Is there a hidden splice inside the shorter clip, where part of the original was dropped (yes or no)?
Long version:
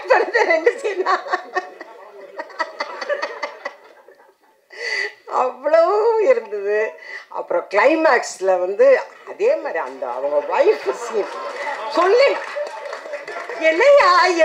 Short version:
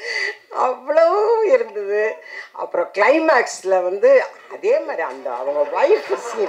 no